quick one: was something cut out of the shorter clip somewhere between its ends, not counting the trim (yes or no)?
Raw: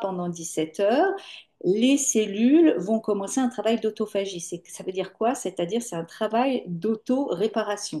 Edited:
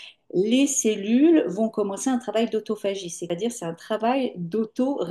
yes